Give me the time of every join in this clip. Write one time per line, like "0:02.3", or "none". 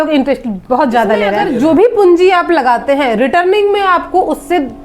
0:01.4

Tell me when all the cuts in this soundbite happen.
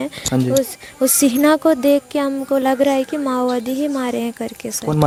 none

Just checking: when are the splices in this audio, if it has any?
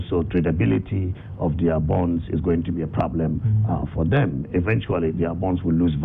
none

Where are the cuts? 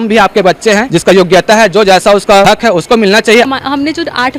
0:00.9
0:02.5
0:03.5

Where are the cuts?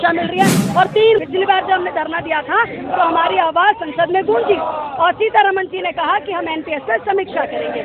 0:01.2

